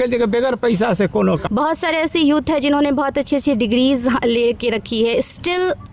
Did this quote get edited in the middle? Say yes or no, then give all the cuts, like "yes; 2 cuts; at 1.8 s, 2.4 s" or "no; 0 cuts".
yes; 1 cut; at 1.4 s